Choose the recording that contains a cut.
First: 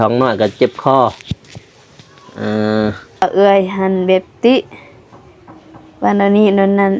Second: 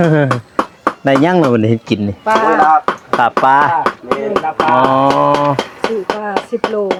first; 1 cut; at 3.2 s

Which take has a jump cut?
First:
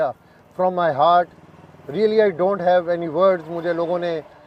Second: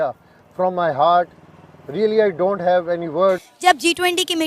second; 1 cut; at 3.5 s

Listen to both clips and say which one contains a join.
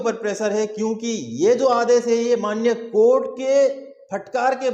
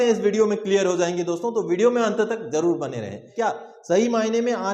second; 1 cut; at 3.2 s

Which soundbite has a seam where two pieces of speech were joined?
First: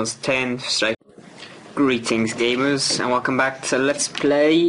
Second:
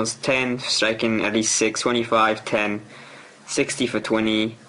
second; 1 cut; at 1.0 s

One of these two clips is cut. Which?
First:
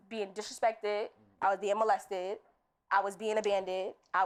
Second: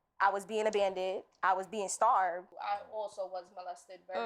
second; 1 cut; at 2.5 s

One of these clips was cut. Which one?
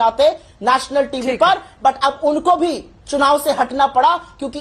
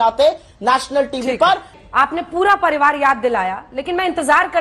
second; 1 cut; at 1.7 s

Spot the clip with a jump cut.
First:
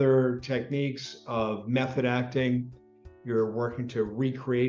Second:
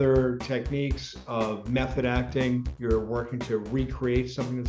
second; 1 cut; at 2.7 s

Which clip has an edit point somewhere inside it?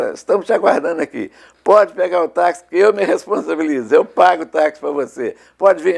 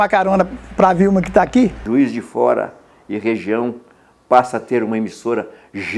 second; 1 cut; at 1.8 s

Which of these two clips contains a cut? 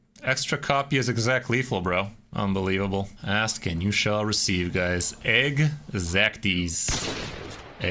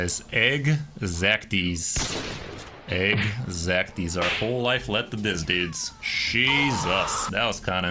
first; 2 cuts; at 2.2 s, 3.2 s

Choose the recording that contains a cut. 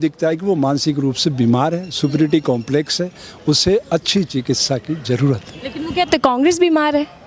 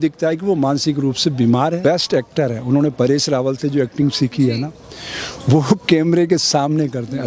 second; 1 cut; at 1.8 s

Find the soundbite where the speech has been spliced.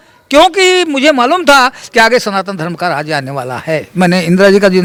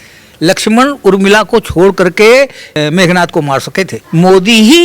second; 2 cuts; at 2.7 s, 4.0 s

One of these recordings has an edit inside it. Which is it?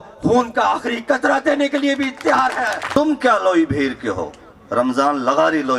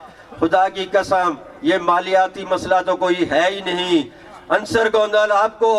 first; 1 cut; at 2.8 s

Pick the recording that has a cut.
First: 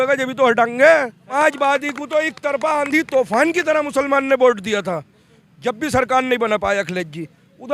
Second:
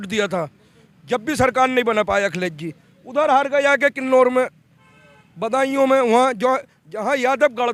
first; 1 cut; at 1.3 s

